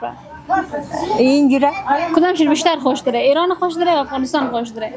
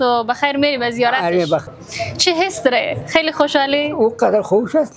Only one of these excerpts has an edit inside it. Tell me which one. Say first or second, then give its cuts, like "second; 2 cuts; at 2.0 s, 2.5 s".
second; 1 cut; at 1.6 s